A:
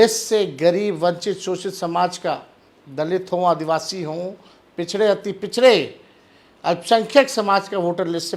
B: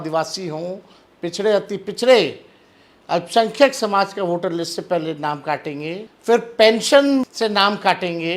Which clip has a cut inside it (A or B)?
B